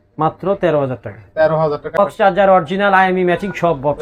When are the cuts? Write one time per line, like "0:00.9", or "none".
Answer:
0:02.0